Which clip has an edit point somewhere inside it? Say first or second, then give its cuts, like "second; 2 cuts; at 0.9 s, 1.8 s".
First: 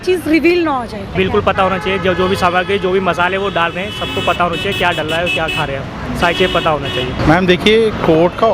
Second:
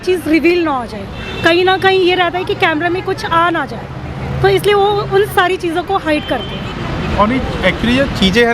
first; 2 cuts; at 1.1 s, 7.2 s